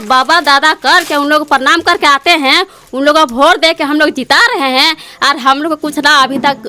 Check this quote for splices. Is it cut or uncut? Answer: uncut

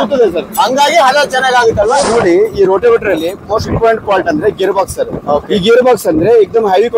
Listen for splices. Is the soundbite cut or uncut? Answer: cut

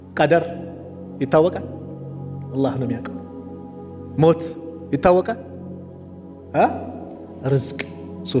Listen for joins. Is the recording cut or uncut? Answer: uncut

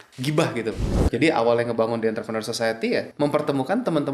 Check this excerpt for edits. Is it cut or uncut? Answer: cut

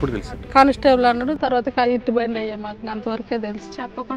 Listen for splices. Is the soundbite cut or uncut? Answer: uncut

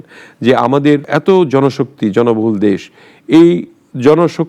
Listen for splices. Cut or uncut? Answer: cut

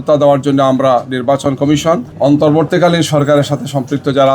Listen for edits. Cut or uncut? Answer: cut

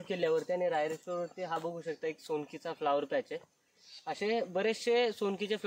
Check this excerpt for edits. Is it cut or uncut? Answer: uncut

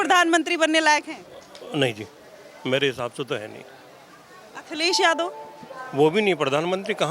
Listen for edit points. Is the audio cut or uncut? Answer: uncut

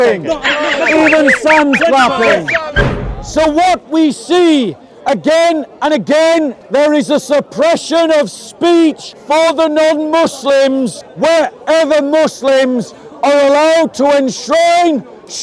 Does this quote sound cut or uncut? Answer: cut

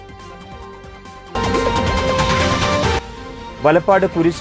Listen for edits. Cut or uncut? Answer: cut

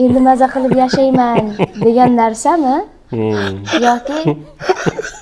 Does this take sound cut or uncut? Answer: uncut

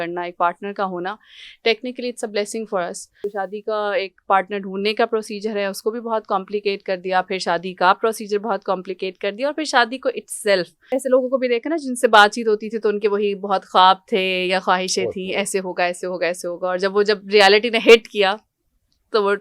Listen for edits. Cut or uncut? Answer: cut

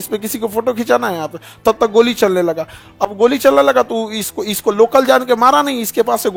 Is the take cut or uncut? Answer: uncut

